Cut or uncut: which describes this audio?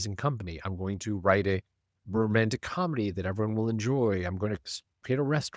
cut